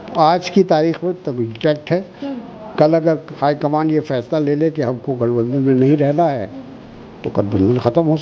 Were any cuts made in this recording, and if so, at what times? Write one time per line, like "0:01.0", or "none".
none